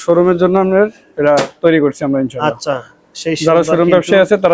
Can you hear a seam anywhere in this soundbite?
no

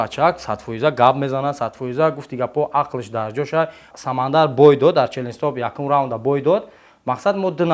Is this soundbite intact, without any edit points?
no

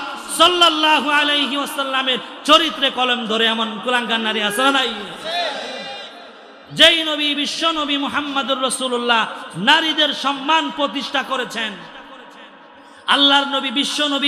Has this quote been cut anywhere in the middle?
no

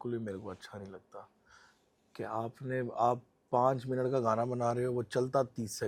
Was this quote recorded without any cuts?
yes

